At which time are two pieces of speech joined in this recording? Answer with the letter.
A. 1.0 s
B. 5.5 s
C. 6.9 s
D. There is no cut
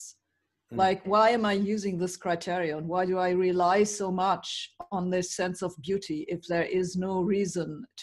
A